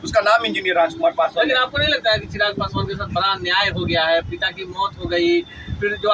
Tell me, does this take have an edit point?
no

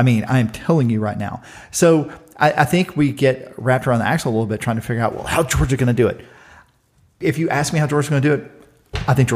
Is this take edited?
yes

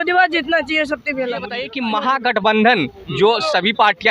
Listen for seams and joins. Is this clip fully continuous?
no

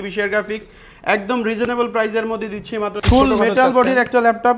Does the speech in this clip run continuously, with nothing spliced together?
no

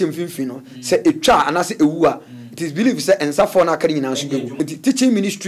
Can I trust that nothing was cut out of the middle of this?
no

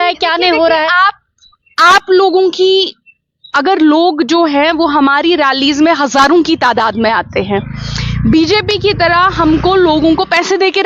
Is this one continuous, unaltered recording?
yes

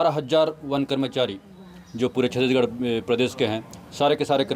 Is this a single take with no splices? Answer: yes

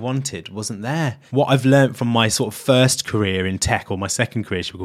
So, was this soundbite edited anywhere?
yes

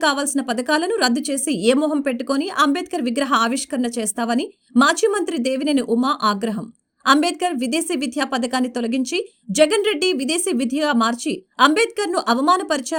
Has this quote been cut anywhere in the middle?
no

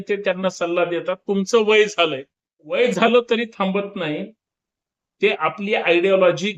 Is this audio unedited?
no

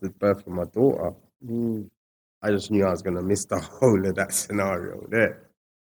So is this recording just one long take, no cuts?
yes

